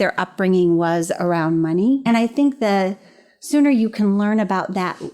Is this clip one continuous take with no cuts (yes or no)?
no